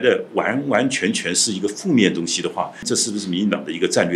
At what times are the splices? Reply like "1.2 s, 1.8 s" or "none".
2.9 s